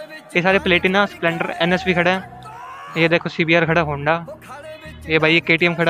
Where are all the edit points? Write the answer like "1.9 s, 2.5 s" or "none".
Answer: 3.3 s